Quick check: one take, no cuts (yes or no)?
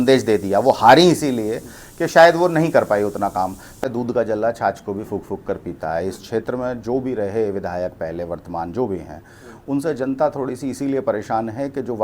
no